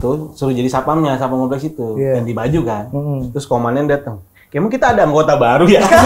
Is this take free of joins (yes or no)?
yes